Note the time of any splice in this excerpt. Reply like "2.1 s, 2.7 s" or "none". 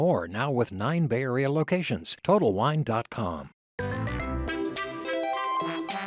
3.6 s